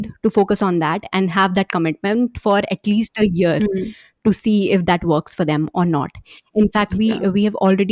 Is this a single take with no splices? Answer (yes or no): yes